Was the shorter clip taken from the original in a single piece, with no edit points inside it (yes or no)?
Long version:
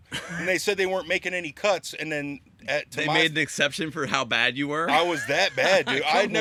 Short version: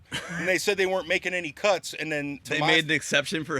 no